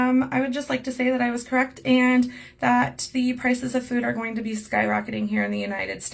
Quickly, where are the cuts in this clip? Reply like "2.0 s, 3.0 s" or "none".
none